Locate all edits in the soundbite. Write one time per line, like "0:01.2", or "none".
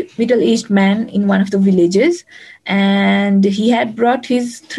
none